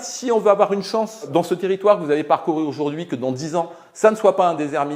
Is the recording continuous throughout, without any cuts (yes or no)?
yes